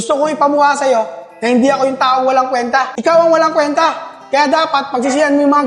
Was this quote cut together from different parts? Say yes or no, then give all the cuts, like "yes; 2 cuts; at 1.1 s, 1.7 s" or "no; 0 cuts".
yes; 1 cut; at 2.9 s